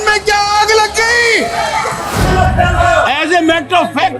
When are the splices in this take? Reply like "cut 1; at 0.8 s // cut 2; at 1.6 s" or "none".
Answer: cut 1; at 2.1 s

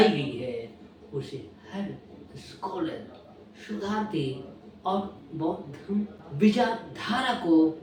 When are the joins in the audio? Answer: none

